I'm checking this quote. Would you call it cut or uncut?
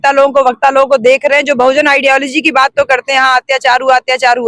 uncut